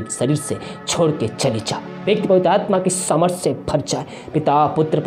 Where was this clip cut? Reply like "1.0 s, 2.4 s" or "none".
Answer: 2.0 s